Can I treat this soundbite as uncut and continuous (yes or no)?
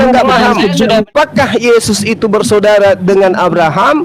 no